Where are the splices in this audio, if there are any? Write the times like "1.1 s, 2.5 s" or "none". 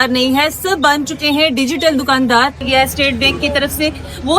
2.6 s